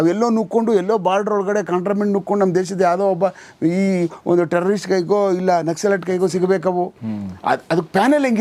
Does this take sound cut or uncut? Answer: uncut